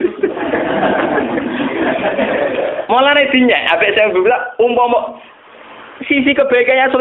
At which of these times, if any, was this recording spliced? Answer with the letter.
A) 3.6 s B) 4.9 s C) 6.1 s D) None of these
D